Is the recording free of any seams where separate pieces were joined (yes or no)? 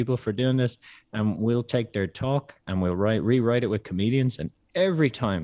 yes